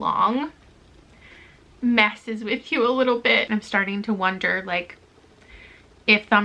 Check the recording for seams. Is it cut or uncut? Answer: cut